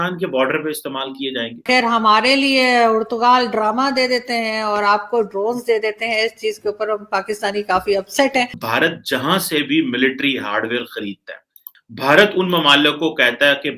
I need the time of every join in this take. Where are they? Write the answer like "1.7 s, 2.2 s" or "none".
1.6 s, 8.6 s